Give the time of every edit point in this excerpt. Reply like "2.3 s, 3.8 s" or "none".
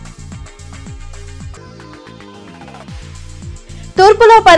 1.5 s, 3.4 s